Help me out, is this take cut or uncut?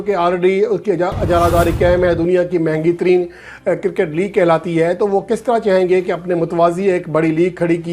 uncut